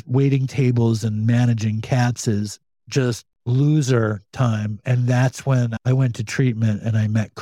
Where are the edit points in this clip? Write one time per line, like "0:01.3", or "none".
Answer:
0:03.3